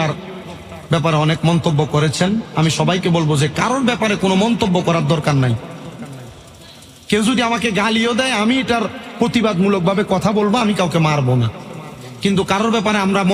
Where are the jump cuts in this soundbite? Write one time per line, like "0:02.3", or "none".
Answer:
none